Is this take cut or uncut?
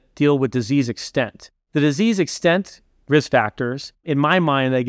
uncut